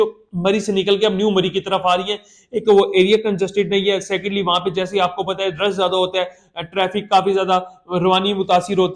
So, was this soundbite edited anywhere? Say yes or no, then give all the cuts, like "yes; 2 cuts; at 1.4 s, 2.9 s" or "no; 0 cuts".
no; 0 cuts